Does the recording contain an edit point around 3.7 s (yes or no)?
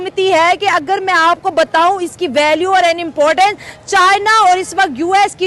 no